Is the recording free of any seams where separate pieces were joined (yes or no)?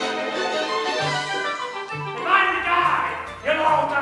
yes